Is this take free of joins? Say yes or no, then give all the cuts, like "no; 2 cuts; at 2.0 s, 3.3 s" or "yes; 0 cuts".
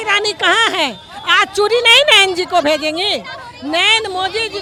yes; 0 cuts